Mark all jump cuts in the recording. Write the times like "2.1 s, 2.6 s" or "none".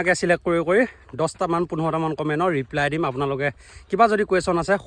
none